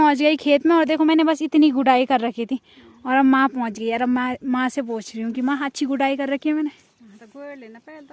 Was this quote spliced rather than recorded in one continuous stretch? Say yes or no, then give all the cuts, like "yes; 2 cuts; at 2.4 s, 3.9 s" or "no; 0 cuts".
no; 0 cuts